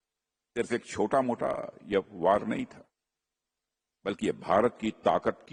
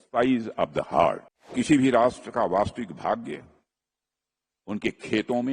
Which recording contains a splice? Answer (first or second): second